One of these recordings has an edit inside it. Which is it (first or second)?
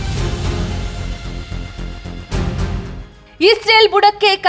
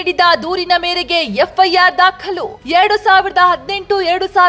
first